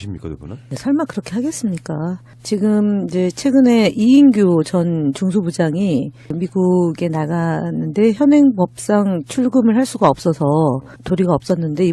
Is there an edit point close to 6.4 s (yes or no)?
no